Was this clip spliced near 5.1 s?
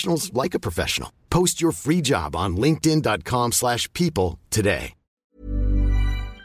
yes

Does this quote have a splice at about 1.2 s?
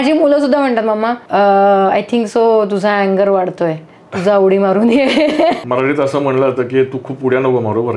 yes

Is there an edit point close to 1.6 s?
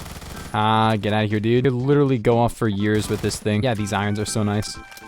yes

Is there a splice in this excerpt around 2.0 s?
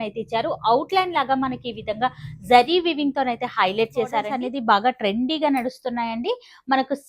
no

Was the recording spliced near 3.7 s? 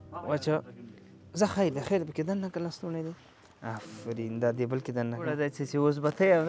no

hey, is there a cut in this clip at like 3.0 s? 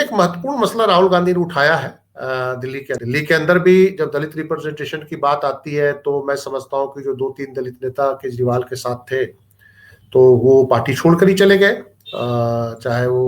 yes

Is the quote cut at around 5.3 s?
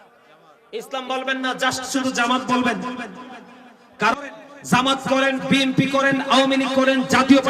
no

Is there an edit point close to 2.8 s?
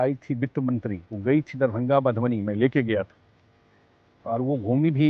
no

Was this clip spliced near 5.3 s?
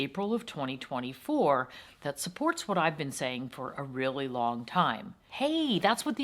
yes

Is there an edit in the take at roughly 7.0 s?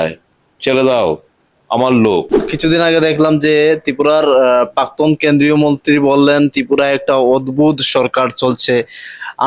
no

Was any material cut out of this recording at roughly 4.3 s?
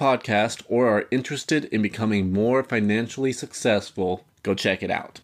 yes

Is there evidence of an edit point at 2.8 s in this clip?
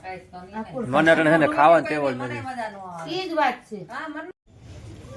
no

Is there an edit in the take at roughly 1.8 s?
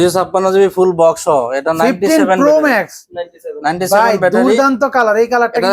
no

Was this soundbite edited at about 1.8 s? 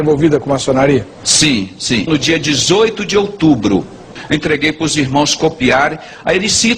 no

